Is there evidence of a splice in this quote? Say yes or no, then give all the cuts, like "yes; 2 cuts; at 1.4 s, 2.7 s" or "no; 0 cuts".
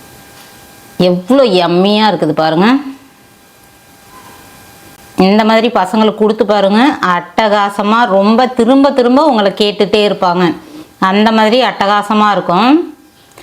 yes; 1 cut; at 5.0 s